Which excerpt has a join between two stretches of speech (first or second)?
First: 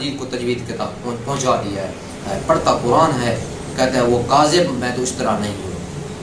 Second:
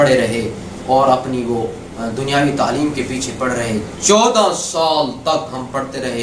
first